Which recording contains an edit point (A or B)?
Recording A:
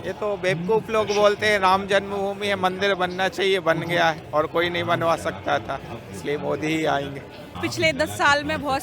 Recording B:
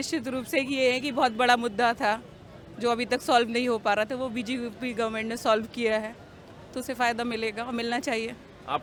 A